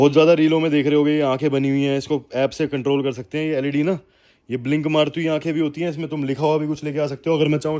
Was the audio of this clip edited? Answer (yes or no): no